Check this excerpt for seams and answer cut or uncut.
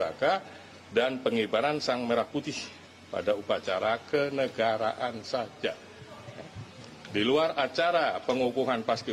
uncut